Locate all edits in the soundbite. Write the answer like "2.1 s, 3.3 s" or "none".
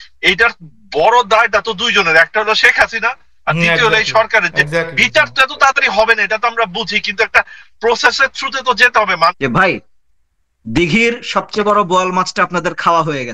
9.4 s